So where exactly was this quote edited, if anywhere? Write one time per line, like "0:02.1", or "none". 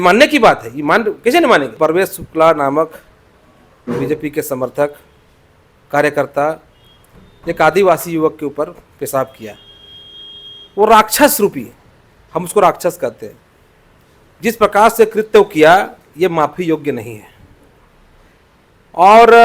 0:01.8